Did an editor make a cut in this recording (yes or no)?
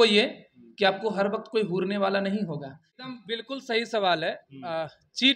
yes